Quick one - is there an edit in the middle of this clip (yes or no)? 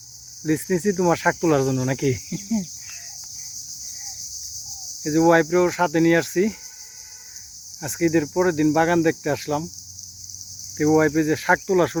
no